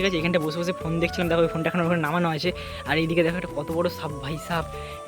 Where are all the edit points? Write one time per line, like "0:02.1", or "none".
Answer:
none